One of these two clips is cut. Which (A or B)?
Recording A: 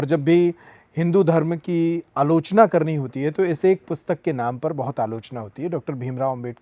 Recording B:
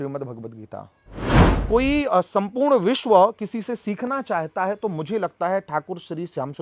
B